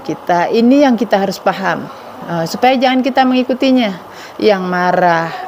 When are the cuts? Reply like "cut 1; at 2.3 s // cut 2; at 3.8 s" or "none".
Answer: none